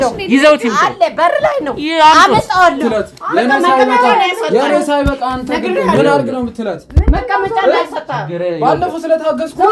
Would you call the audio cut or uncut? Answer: cut